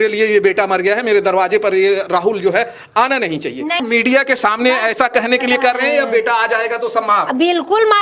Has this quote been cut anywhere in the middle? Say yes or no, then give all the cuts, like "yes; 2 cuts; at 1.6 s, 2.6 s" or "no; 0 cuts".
yes; 1 cut; at 3.8 s